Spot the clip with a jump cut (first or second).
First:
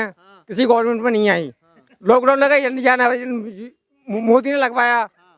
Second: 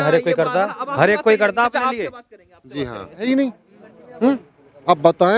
second